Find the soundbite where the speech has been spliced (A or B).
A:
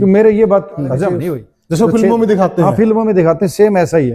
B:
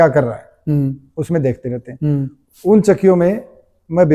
A